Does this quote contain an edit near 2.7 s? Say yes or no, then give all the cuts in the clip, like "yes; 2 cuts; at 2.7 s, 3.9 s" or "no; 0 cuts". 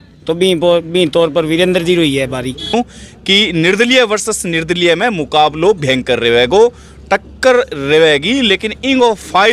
yes; 1 cut; at 2.7 s